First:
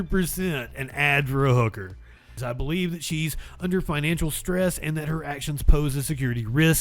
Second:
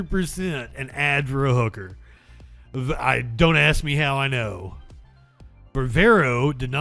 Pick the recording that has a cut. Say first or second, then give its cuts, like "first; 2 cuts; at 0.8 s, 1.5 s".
first; 1 cut; at 2.3 s